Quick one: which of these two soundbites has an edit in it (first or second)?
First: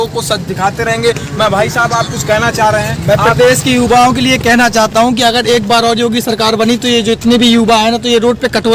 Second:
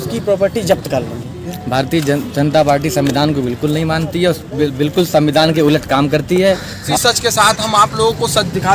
second